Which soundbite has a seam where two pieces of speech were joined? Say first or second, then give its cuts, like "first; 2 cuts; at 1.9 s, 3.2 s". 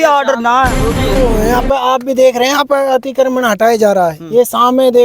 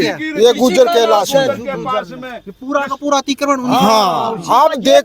first; 1 cut; at 1.2 s